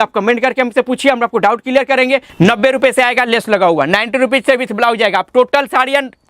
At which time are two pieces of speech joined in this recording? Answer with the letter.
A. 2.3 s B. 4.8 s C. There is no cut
A